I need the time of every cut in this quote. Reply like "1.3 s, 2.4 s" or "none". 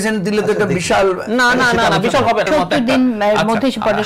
2.5 s